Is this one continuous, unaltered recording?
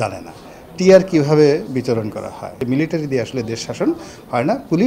no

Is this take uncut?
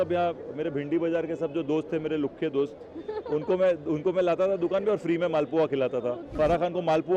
no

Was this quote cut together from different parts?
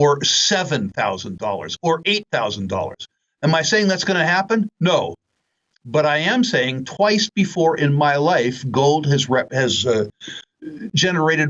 no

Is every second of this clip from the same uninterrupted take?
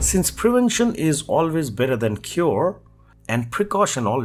yes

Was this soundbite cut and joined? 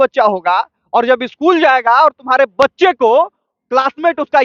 no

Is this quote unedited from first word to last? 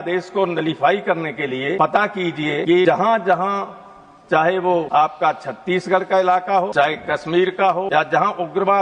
no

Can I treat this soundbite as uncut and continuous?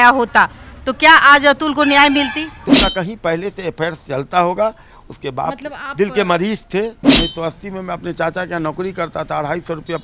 no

